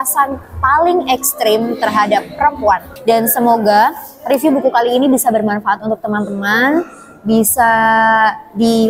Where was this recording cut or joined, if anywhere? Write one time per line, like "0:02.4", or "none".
0:02.9